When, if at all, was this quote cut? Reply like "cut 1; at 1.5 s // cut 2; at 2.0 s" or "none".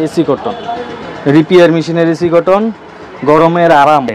none

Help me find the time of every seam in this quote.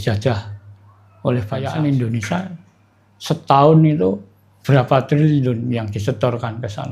cut 1; at 1.6 s

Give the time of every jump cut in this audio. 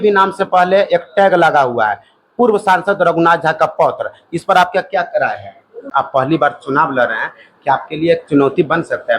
cut 1; at 5.8 s

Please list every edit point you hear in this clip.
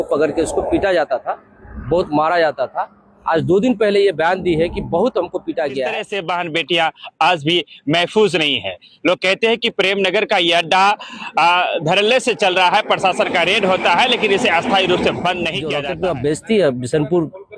cut 1; at 6.1 s // cut 2; at 15.7 s

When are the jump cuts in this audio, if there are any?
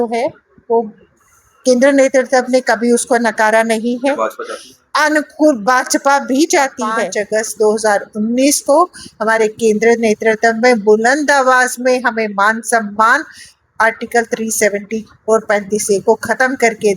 cut 1; at 7.1 s

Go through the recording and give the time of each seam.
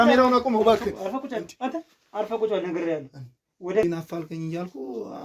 cut 1; at 3.8 s

